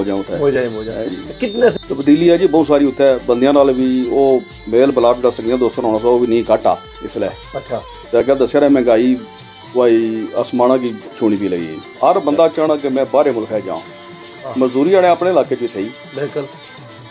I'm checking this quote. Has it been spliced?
yes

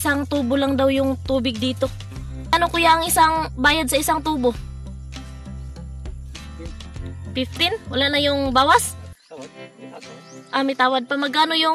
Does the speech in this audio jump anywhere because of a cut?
yes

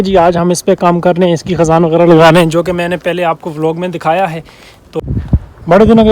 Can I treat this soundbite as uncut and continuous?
no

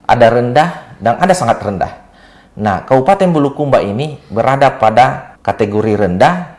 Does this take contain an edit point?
no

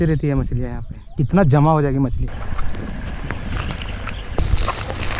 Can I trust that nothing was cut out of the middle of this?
yes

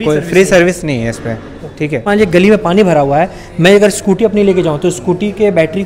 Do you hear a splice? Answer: yes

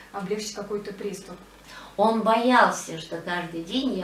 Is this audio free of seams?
no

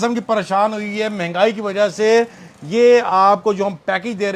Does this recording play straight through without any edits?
yes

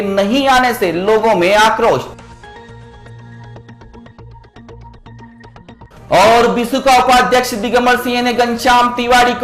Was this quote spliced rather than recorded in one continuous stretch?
no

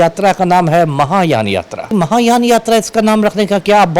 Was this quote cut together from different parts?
yes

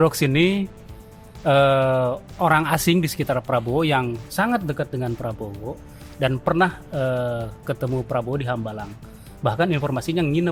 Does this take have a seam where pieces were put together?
no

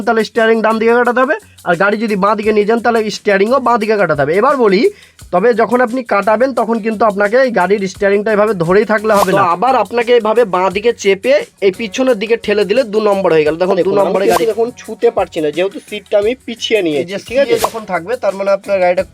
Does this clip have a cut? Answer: yes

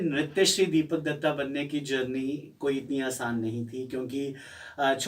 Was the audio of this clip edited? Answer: no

